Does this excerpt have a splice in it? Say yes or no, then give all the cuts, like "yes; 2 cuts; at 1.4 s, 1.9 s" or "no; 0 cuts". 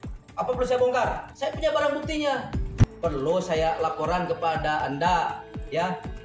yes; 1 cut; at 2.7 s